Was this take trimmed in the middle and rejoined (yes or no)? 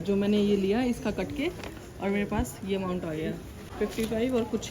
yes